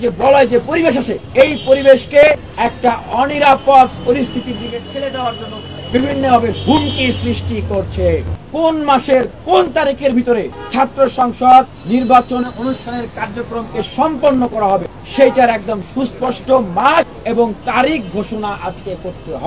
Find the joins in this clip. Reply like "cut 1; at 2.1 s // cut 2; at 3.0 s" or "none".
cut 1; at 1.2 s // cut 2; at 5.7 s // cut 3; at 8.5 s

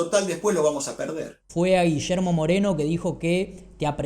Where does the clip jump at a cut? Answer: cut 1; at 1.4 s

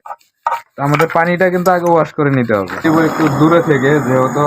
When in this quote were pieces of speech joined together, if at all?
cut 1; at 2.8 s

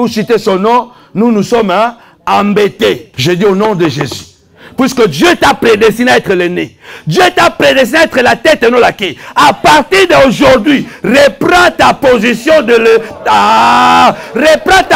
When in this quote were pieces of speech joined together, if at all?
cut 1; at 3.0 s

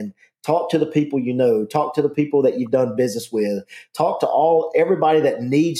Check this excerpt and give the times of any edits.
none

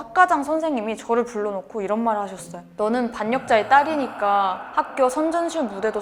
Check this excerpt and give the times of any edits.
none

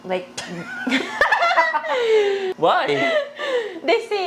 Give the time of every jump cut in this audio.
cut 1; at 2.5 s

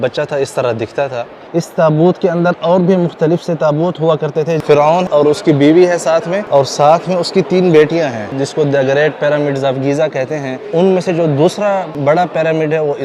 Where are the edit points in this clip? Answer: cut 1; at 1.4 s // cut 2; at 5.0 s // cut 3; at 6.4 s // cut 4; at 8.4 s // cut 5; at 10.6 s // cut 6; at 11.9 s

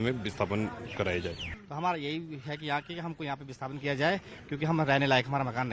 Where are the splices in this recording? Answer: cut 1; at 1.4 s

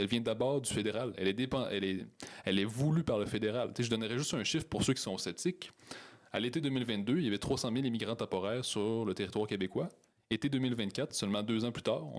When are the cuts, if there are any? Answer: none

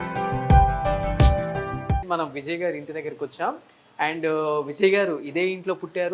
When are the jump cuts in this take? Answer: none

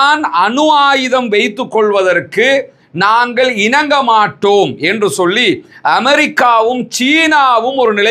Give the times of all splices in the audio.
none

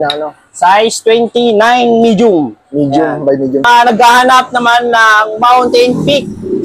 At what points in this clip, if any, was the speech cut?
cut 1; at 3.6 s

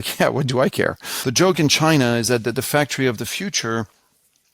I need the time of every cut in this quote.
cut 1; at 1.1 s

